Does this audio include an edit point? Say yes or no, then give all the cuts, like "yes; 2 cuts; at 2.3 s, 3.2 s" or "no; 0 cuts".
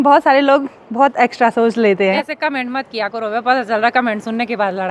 yes; 1 cut; at 2.3 s